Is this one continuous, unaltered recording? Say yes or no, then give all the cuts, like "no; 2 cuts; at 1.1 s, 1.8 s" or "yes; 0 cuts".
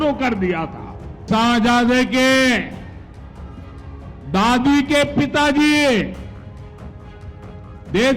no; 1 cut; at 1.2 s